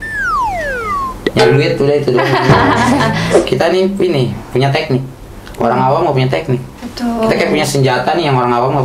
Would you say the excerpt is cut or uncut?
cut